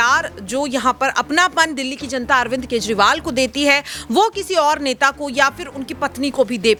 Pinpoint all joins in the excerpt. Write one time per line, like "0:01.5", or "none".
none